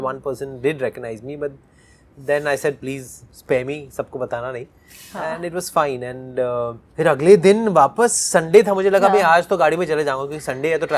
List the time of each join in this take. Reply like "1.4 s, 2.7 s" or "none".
none